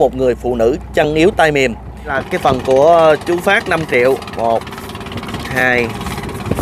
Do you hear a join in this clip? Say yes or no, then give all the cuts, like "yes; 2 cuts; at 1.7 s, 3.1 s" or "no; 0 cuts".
yes; 1 cut; at 2.2 s